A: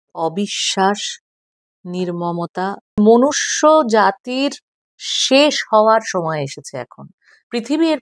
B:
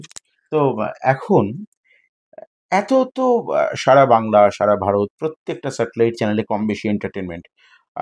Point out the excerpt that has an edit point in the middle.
A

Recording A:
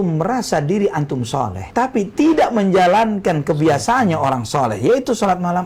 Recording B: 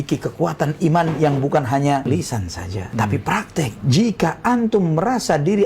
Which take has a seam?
B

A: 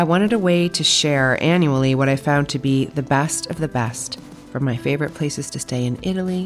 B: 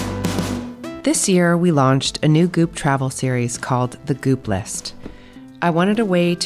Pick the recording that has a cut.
B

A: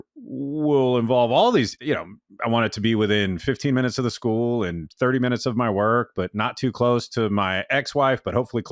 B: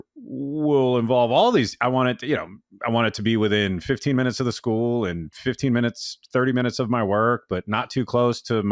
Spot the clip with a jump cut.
A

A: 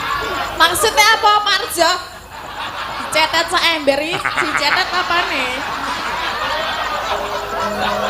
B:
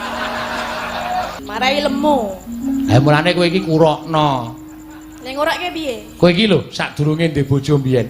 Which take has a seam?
B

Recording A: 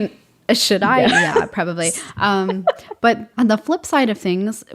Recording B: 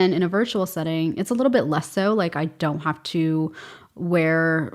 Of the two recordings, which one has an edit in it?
A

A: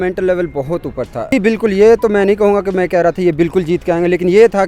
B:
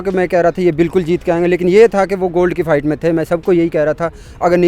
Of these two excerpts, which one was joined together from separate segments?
A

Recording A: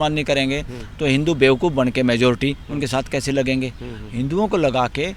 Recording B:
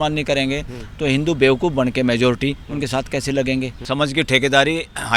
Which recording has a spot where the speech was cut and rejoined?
B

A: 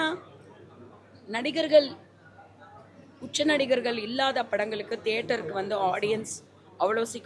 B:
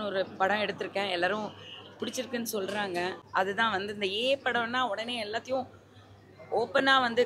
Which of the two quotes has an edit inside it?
B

